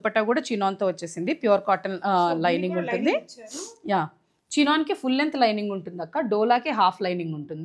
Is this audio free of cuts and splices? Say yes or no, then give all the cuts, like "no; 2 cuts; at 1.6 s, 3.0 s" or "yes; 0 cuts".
yes; 0 cuts